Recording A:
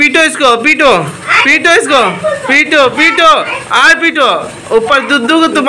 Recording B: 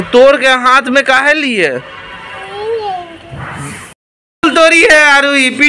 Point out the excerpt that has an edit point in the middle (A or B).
B